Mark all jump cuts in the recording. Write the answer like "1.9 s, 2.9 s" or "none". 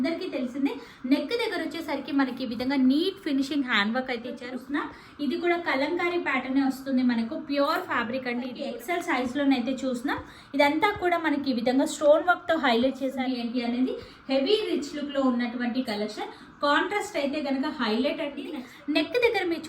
4.4 s, 8.6 s, 13.2 s, 18.5 s